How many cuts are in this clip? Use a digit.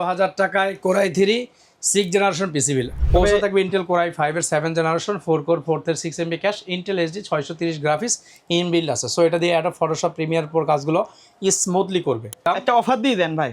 2